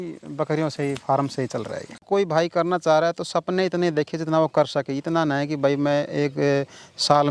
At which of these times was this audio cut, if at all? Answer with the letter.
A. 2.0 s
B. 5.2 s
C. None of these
A